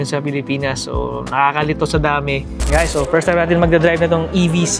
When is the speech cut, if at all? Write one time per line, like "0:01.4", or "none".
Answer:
0:02.5